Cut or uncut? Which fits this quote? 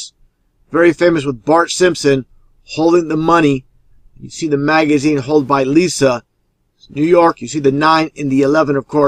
uncut